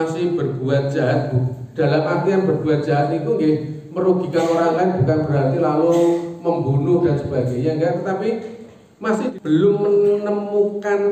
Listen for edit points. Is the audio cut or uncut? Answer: cut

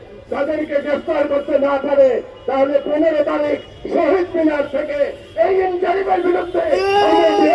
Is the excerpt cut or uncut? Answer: uncut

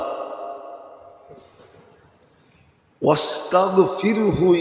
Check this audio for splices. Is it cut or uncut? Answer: uncut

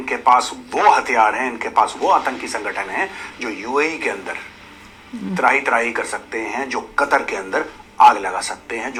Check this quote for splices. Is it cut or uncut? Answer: uncut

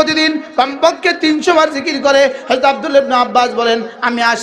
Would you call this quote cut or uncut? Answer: uncut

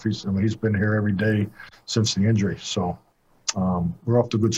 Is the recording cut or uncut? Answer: uncut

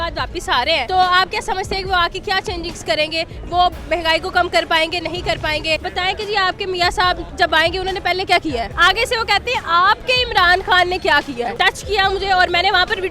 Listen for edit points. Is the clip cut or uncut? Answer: cut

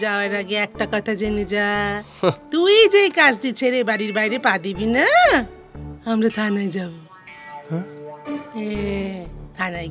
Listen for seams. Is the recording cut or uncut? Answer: uncut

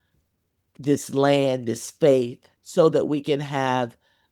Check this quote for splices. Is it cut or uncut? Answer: cut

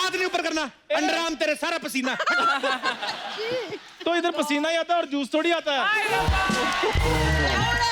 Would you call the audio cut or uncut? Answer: uncut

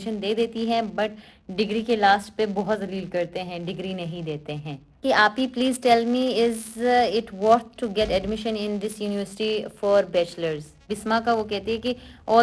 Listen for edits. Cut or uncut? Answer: cut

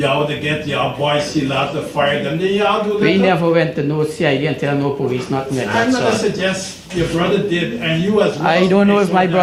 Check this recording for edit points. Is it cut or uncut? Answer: uncut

